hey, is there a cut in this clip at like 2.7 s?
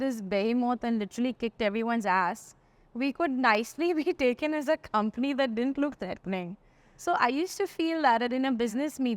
no; 0 cuts

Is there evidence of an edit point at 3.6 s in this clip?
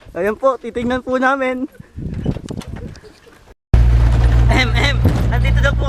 yes; 1 cut; at 3.6 s

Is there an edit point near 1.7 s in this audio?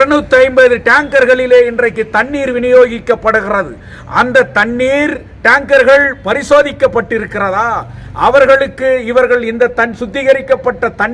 no; 0 cuts

